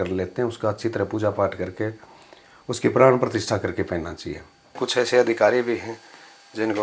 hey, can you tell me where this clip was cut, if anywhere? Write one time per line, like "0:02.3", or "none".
0:04.8